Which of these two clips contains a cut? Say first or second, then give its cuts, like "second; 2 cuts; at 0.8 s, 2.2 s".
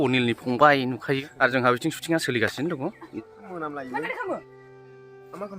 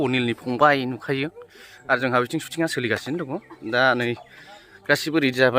first; 2 cuts; at 1.3 s, 3.1 s